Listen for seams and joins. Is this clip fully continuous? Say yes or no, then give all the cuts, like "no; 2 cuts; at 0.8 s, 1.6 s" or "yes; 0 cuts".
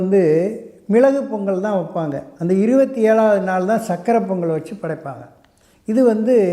yes; 0 cuts